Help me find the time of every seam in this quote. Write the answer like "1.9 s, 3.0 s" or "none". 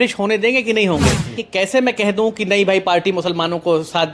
1.4 s